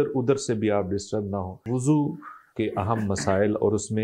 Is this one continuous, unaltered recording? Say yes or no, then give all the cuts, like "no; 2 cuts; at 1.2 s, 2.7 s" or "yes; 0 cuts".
no; 1 cut; at 1.6 s